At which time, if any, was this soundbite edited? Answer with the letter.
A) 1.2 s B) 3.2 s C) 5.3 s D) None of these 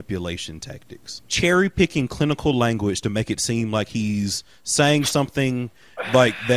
A